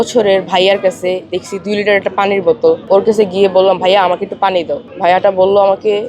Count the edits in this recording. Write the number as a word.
two